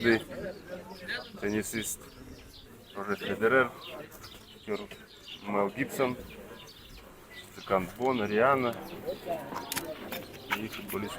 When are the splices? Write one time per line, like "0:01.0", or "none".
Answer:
0:10.1